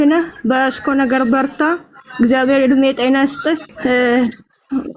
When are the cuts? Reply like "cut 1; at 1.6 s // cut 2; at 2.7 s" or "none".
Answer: cut 1; at 3.7 s